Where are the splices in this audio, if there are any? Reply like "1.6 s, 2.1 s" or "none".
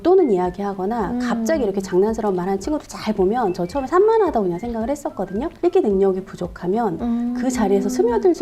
5.5 s